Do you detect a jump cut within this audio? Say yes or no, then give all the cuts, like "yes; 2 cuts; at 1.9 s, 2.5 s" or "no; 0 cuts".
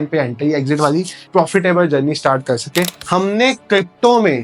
yes; 2 cuts; at 1.2 s, 2.9 s